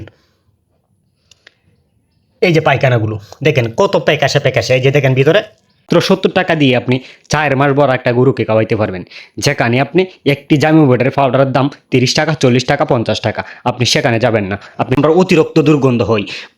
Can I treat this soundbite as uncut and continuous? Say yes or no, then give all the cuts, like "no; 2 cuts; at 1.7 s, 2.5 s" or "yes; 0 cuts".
no; 2 cuts; at 5.9 s, 15.0 s